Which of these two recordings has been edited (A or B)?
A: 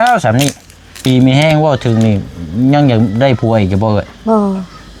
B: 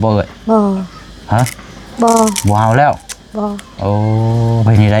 A